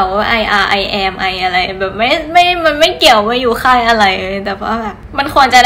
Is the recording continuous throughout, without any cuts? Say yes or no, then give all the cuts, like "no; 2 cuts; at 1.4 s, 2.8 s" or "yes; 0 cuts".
yes; 0 cuts